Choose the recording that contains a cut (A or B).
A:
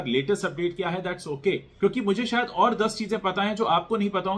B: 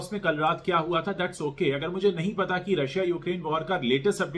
A